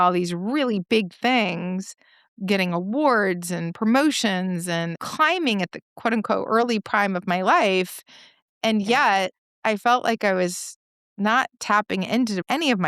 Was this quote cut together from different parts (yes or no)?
no